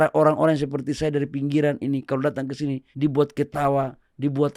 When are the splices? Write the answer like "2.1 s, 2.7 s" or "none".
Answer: 2.9 s